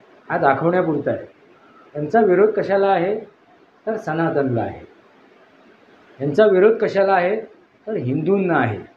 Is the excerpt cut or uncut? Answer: uncut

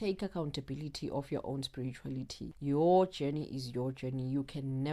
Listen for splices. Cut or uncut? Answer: cut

